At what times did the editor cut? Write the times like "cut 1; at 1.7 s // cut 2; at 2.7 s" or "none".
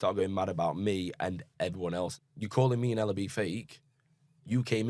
cut 1; at 2.2 s